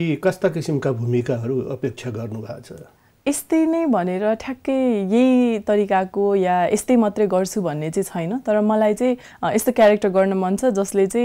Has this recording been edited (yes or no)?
no